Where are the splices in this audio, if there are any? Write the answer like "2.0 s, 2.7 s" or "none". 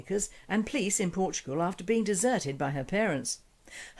none